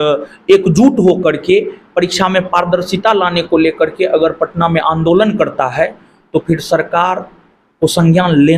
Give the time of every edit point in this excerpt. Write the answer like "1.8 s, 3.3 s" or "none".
none